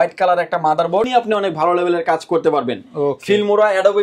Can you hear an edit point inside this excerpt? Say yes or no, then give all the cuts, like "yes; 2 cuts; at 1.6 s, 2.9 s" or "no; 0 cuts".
yes; 1 cut; at 1.1 s